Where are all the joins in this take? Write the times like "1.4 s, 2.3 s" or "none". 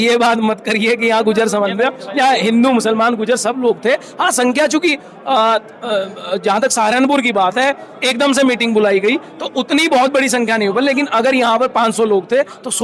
none